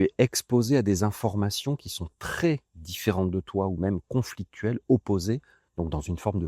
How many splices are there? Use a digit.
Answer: 1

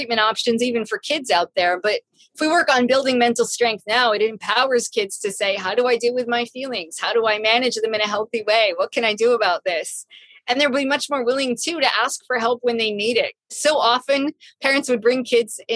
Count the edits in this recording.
1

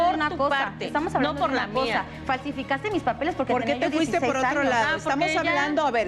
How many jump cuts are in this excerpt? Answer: 0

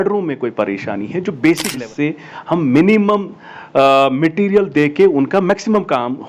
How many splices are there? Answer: 1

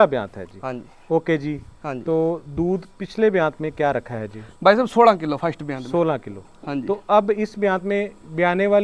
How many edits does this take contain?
0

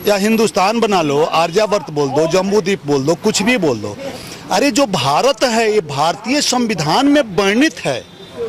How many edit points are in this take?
0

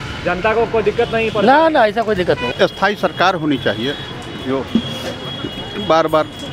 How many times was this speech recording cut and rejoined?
1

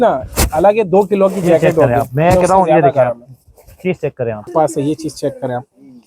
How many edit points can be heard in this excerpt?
1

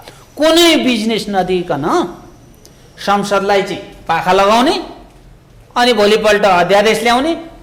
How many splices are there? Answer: 0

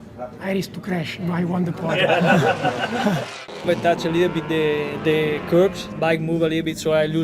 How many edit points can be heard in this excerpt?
2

